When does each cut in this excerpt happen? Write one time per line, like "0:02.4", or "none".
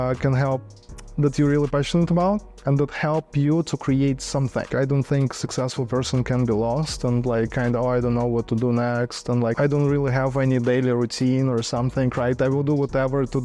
0:04.7
0:09.5